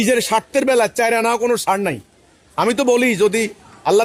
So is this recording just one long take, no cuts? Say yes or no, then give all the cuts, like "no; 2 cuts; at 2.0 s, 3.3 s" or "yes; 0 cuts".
yes; 0 cuts